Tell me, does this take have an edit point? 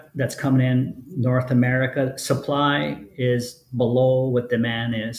no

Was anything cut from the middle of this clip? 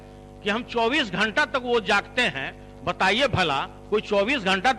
no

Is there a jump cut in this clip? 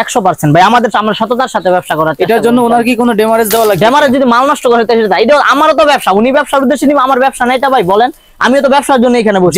no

